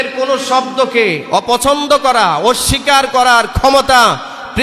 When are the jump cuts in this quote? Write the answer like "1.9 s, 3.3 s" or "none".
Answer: none

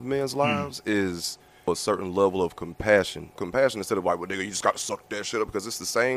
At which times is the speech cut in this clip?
1.7 s, 3.4 s

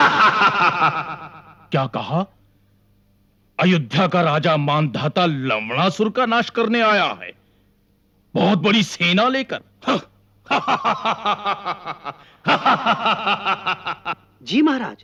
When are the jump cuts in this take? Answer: none

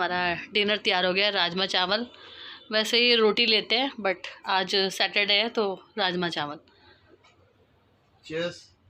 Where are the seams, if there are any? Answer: none

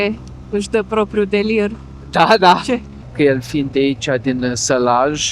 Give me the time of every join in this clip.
3.0 s

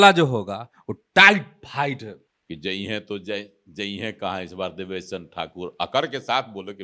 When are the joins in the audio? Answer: 2.2 s

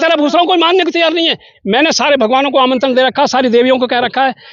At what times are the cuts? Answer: 1.5 s

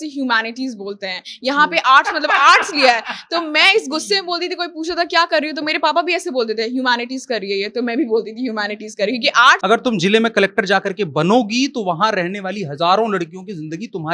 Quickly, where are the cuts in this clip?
9.6 s

